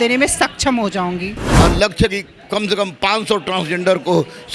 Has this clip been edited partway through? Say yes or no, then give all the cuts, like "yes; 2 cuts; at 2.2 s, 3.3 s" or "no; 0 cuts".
yes; 1 cut; at 1.5 s